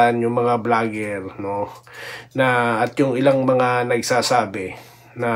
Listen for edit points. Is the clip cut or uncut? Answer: uncut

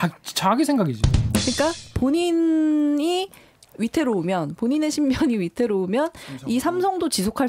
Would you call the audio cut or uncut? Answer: uncut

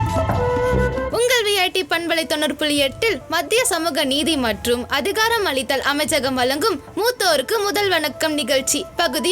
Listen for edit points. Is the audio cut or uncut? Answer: cut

